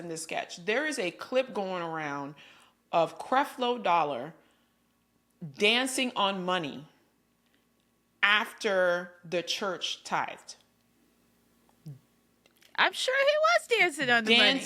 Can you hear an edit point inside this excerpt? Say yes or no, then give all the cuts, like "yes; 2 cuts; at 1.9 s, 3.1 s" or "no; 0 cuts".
no; 0 cuts